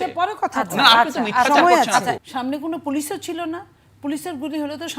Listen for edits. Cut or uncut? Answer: cut